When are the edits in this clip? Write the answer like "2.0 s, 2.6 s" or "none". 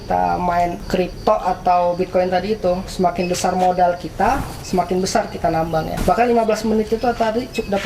1.1 s, 6.0 s